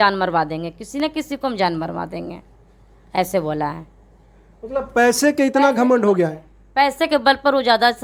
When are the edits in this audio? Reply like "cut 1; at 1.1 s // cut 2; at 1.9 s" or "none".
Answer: none